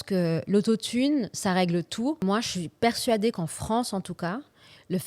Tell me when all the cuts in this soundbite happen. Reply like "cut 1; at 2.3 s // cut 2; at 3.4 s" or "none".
cut 1; at 2.2 s